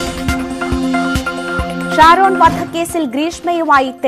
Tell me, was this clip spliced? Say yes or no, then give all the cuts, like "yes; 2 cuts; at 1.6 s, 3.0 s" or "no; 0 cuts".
yes; 1 cut; at 2.0 s